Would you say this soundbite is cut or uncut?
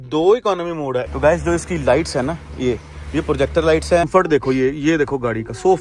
cut